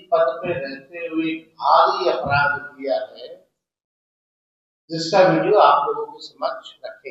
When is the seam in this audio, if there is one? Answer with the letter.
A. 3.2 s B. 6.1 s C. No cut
C